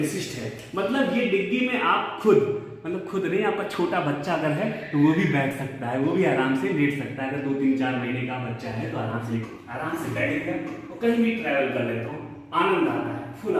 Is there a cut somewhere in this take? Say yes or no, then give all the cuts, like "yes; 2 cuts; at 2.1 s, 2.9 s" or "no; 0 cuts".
yes; 1 cut; at 9.5 s